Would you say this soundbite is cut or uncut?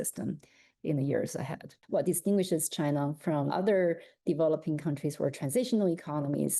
cut